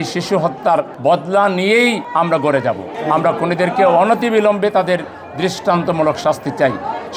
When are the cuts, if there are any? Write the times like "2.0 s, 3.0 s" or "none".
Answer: none